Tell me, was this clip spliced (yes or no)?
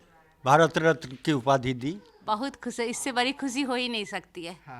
yes